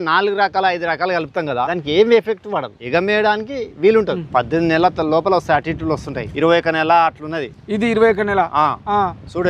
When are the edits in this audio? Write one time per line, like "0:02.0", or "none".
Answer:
0:01.7
0:02.8
0:04.2
0:06.2